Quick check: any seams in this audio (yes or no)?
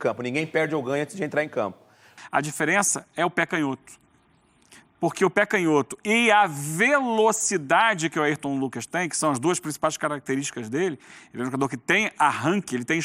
yes